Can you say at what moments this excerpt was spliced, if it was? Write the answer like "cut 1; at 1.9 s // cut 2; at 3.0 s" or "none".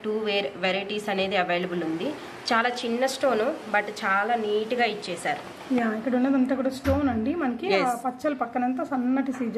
none